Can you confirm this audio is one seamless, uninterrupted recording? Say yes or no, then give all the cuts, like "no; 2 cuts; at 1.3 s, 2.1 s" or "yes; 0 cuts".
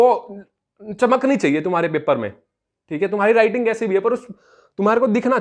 yes; 0 cuts